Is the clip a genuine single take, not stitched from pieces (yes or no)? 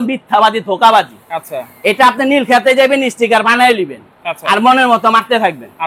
yes